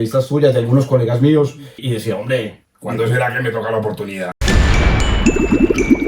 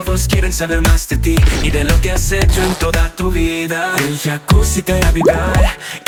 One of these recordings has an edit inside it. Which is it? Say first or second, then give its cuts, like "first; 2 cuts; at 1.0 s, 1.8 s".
first; 3 cuts; at 1.8 s, 2.7 s, 4.4 s